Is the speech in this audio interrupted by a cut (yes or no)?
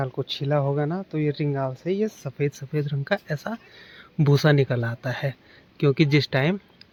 no